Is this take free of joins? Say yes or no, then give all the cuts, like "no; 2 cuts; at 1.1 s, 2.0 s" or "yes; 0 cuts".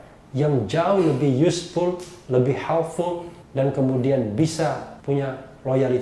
no; 1 cut; at 4.9 s